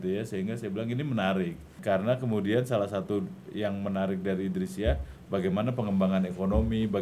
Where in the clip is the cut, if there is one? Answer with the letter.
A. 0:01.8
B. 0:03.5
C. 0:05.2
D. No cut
A